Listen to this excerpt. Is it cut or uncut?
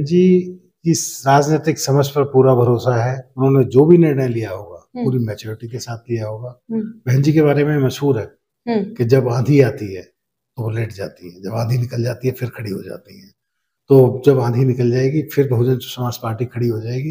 uncut